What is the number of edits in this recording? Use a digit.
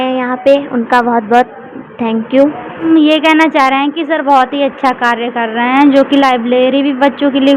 1